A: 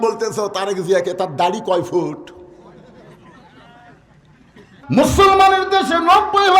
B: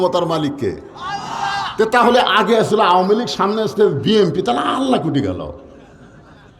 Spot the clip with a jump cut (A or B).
A